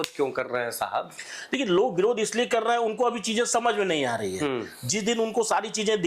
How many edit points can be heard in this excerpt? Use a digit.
0